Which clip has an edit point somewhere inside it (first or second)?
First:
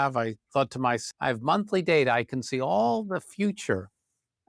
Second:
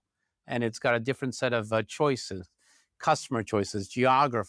first